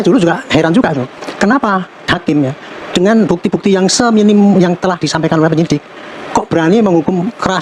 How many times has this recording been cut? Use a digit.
0